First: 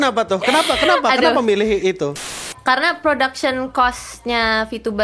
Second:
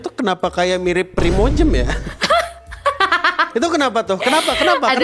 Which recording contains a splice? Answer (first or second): first